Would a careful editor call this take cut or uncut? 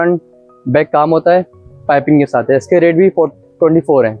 uncut